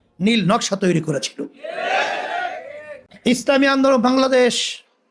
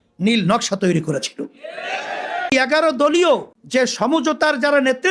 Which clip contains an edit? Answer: second; 2 cuts; at 2.5 s, 3.6 s

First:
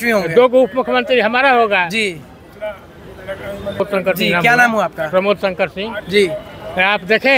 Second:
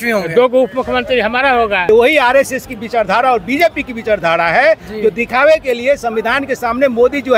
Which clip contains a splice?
second; 1 cut; at 1.9 s

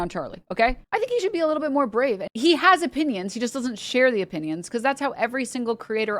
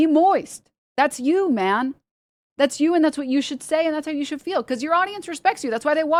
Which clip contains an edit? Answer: first; 2 cuts; at 0.8 s, 2.2 s

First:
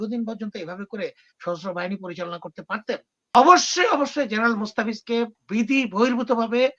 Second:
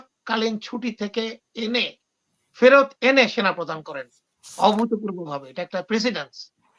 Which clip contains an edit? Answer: first; 1 cut; at 3.4 s

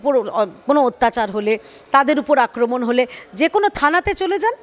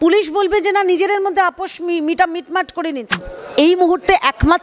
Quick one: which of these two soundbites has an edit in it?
second; 1 cut; at 3.1 s

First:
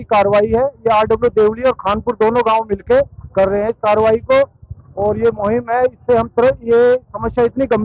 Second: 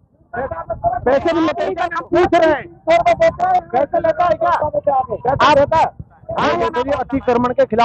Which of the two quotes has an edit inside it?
second; 2 cuts; at 1.8 s, 6.8 s

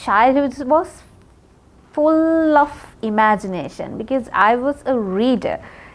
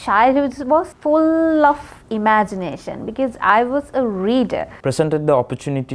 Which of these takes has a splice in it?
second; 2 cuts; at 0.9 s, 4.7 s

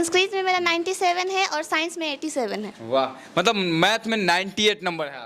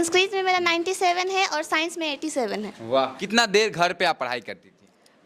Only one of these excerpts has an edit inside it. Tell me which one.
second; 1 cut; at 3.2 s

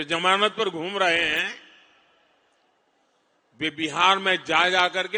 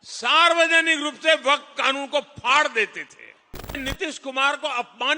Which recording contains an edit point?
second; 1 cut; at 3.8 s

